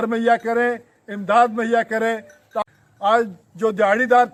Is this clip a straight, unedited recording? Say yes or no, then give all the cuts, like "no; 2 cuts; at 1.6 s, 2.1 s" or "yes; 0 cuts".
yes; 0 cuts